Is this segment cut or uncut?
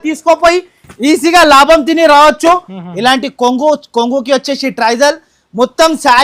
cut